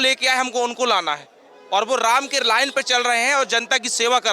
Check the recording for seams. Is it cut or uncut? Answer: uncut